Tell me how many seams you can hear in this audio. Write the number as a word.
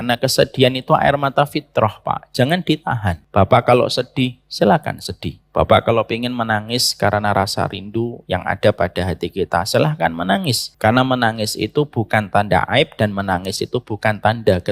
two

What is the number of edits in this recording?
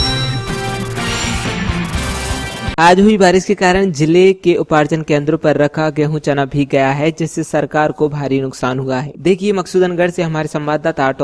one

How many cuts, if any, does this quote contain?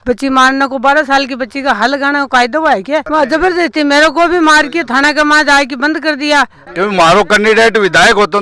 one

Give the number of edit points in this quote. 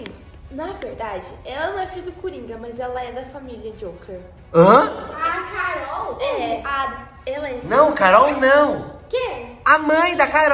zero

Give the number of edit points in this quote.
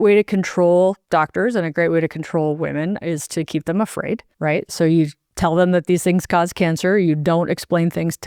two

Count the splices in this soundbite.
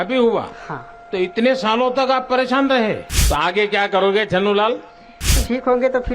two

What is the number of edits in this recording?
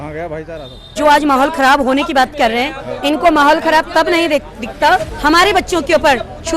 two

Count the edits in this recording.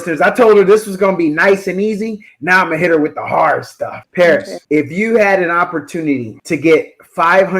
three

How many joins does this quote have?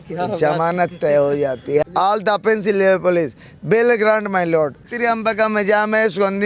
two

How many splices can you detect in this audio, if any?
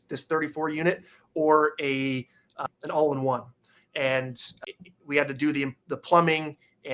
two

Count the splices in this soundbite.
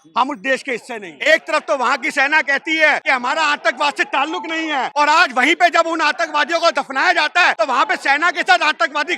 four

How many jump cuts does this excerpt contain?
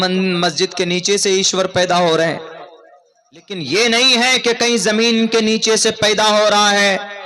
one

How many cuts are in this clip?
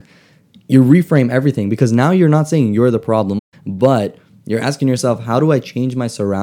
one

